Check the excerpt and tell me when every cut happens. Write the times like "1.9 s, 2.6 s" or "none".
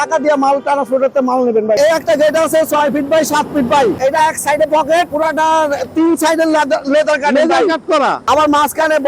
1.8 s, 4.0 s, 5.1 s, 8.2 s